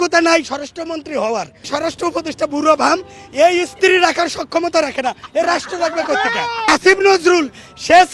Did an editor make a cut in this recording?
yes; 2 cuts; at 1.7 s, 6.7 s

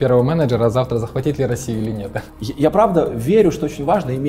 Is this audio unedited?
no; 1 cut; at 2.3 s

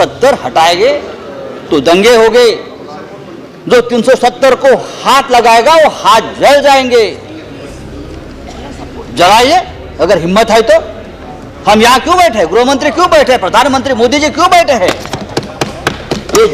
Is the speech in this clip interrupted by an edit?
no; 0 cuts

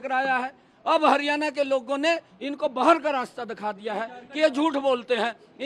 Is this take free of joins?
yes; 0 cuts

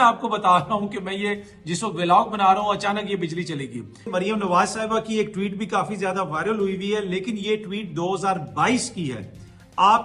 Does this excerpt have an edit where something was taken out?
yes; 1 cut; at 4.1 s

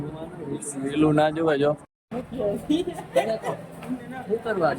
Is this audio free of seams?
no; 1 cut; at 1.9 s

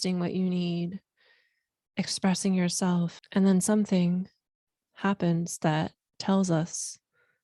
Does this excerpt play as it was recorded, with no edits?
no; 1 cut; at 3.2 s

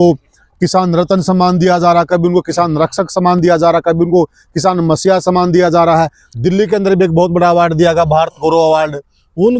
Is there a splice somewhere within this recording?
no; 0 cuts

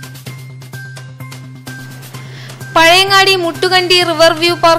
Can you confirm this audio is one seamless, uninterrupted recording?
no; 1 cut; at 1.7 s

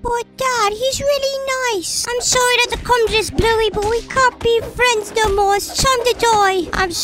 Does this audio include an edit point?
yes; 1 cut; at 2.0 s

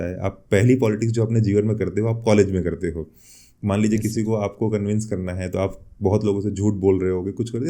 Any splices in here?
no; 0 cuts

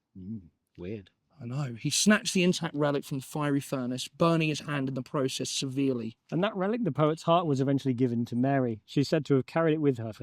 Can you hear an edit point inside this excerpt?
yes; 1 cut; at 6.2 s

